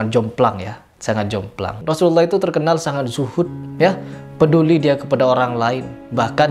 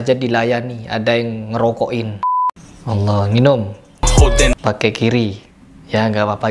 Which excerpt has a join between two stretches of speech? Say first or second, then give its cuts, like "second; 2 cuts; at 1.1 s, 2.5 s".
second; 1 cut; at 2.6 s